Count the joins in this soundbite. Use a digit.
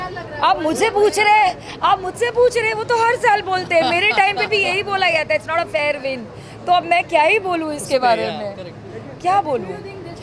0